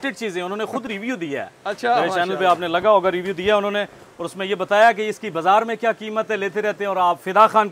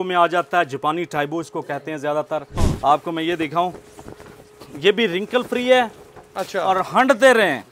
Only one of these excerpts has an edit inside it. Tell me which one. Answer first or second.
second